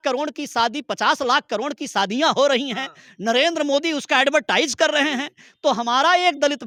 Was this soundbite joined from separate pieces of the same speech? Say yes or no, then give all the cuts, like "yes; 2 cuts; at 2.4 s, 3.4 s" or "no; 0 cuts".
no; 0 cuts